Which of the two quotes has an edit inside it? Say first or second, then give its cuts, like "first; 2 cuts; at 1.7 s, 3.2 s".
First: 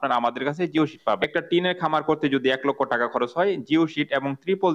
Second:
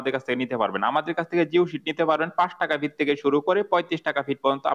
first; 1 cut; at 1.2 s